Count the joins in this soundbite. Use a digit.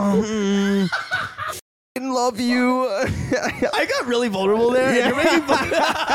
2